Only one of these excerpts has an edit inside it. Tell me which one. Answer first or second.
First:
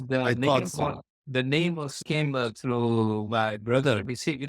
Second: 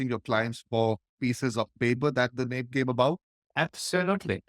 first